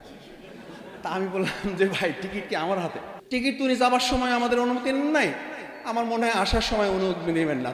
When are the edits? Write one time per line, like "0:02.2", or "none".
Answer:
0:03.1

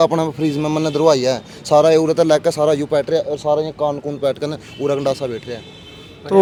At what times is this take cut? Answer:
none

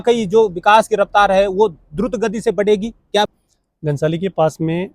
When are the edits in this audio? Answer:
0:03.3

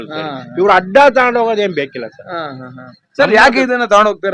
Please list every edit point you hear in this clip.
none

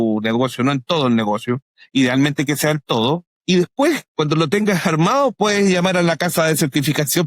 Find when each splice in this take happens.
0:03.3
0:04.1

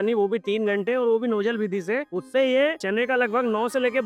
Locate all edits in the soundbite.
0:02.1
0:02.8

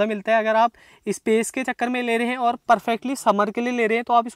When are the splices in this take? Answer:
none

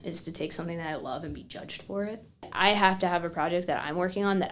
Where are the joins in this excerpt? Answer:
0:02.4

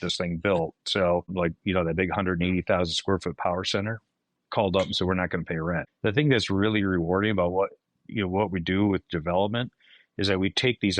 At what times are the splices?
0:01.3
0:05.9

